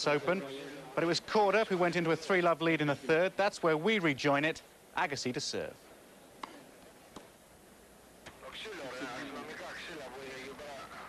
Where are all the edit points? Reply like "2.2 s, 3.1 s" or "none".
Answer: none